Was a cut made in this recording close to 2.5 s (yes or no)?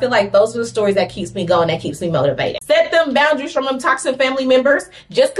yes